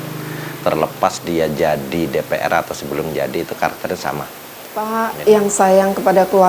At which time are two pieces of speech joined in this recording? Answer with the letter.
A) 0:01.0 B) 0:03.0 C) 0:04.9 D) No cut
C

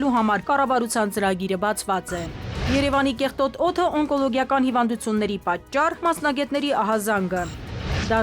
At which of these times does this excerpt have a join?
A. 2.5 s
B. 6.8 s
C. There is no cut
A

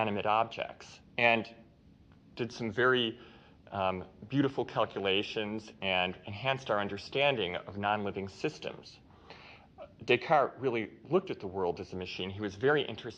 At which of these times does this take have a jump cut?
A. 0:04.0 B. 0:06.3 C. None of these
B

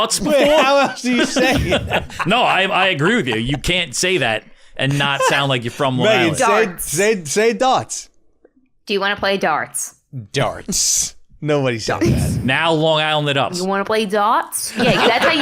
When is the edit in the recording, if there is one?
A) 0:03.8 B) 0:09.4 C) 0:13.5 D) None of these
C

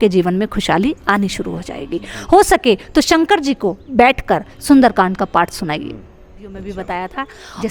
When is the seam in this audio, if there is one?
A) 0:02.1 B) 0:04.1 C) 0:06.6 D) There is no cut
C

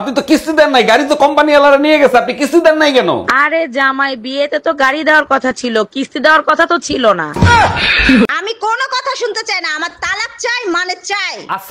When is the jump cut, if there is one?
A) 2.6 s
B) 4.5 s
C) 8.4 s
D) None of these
C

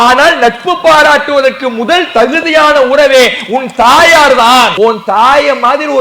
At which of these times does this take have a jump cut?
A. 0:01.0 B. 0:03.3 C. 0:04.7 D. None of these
C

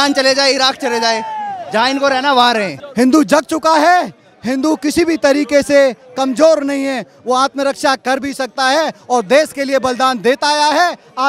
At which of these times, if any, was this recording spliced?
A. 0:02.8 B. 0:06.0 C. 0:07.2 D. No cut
A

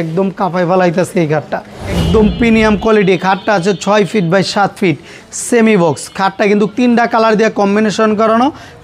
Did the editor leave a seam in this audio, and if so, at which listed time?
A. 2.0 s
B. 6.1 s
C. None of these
A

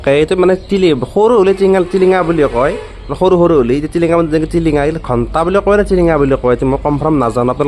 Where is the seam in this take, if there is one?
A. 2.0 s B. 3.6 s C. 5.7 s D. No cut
D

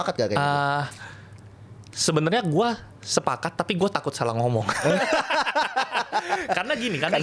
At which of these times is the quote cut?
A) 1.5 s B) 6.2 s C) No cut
C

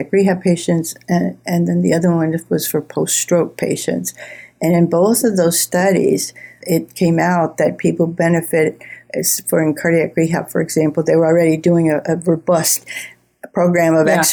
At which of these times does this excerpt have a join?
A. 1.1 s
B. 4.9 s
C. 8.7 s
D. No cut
D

